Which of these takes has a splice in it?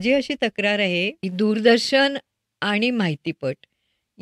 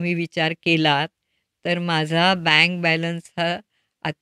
first; 1 cut; at 1.2 s

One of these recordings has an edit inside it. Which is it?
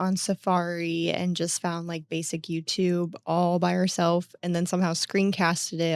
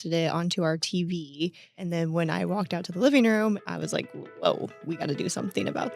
second; 3 cuts; at 1.8 s, 3.6 s, 4.8 s

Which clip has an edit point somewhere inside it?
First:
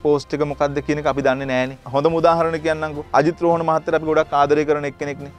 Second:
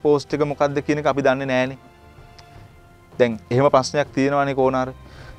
first; 1 cut; at 1.8 s

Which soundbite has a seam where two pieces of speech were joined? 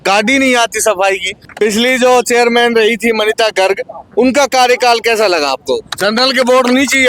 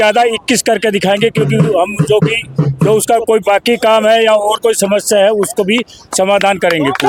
first; 2 cuts; at 1.3 s, 5.9 s

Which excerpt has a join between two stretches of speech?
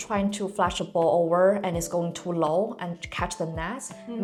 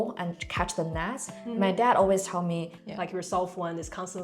second; 1 cut; at 2.7 s

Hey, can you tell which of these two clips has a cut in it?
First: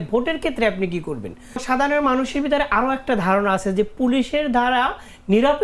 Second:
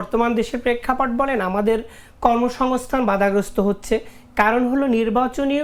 first; 1 cut; at 1.6 s

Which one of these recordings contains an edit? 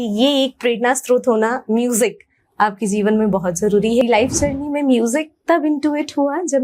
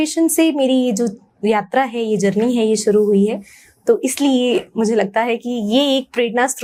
first; 1 cut; at 4.0 s

